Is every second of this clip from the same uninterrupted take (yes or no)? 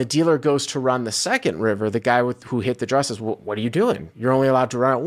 yes